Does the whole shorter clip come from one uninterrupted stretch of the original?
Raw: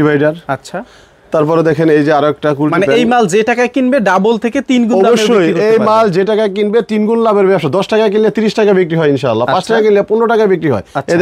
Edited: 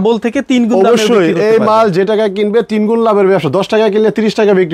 yes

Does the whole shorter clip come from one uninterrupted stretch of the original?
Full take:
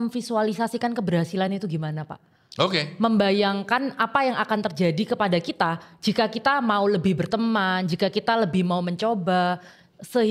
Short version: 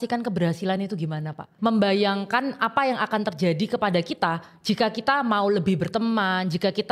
no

